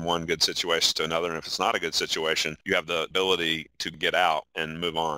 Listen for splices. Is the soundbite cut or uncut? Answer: cut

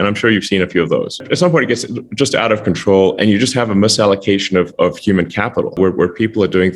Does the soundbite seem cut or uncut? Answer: cut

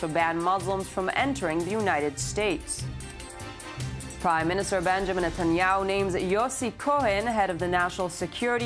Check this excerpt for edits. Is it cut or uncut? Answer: cut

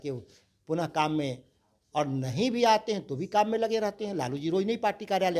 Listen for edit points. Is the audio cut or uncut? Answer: uncut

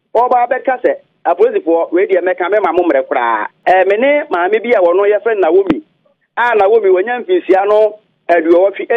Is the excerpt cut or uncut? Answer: cut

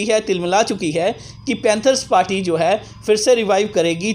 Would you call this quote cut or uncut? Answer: uncut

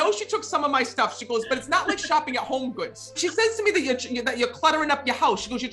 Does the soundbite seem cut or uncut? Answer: cut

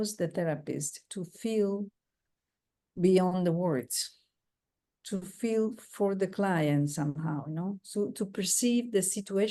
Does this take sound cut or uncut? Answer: uncut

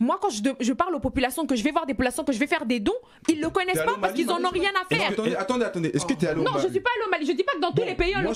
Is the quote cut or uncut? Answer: uncut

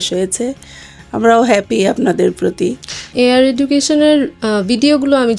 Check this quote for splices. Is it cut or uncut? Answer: cut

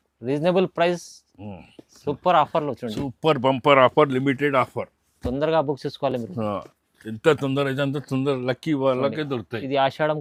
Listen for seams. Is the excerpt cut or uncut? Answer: uncut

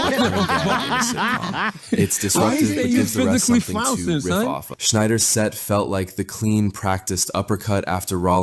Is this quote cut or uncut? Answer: cut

